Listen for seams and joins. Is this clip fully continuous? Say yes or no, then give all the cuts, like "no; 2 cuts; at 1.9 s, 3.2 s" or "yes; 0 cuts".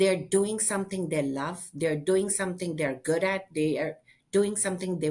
yes; 0 cuts